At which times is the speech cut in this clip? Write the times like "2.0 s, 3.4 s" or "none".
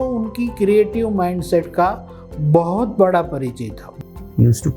none